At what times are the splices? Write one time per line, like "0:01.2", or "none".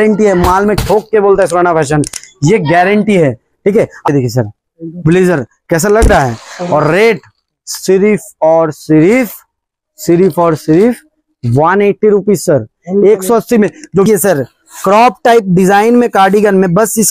0:04.1
0:14.1